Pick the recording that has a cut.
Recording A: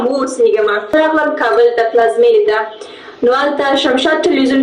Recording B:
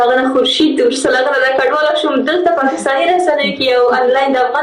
A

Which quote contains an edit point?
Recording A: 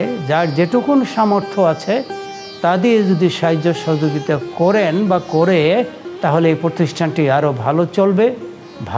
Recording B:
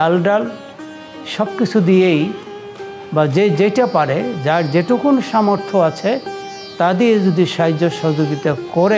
A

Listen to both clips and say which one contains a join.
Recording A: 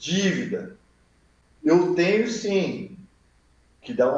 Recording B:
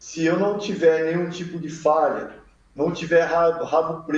A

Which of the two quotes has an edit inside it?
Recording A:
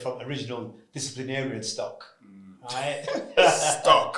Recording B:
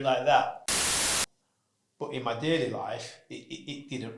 B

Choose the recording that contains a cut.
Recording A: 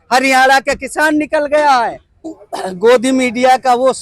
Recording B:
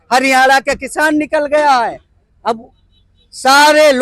A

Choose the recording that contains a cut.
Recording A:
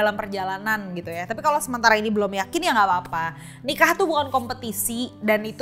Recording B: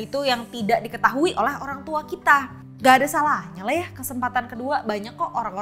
B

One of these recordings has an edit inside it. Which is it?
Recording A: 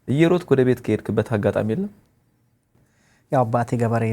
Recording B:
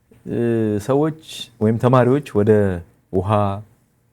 A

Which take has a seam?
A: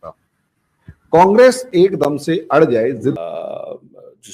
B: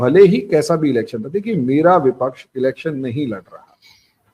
A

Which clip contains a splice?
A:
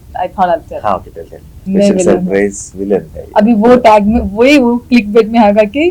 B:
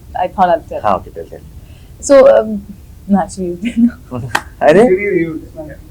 A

